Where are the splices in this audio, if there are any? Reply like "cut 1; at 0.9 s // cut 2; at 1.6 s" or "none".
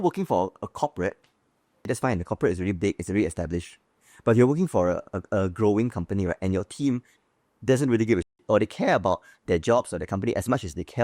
cut 1; at 1.8 s